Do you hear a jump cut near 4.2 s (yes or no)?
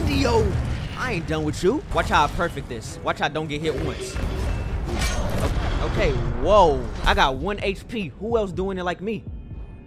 yes